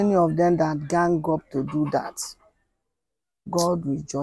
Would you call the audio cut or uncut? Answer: uncut